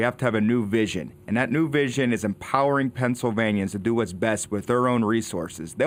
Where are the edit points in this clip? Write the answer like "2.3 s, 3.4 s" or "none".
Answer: none